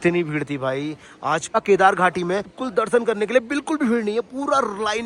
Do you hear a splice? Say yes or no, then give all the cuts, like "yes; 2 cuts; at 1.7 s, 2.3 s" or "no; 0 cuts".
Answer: yes; 2 cuts; at 1.6 s, 2.6 s